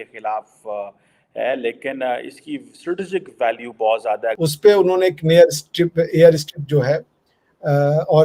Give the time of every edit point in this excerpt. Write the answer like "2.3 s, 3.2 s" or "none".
4.4 s